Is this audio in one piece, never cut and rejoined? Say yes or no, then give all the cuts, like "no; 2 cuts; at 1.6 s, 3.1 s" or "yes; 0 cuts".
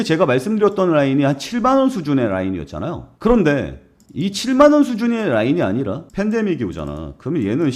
no; 1 cut; at 6.0 s